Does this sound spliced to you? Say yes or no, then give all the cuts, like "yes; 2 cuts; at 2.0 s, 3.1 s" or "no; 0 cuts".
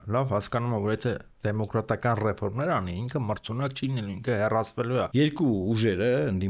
yes; 1 cut; at 5.1 s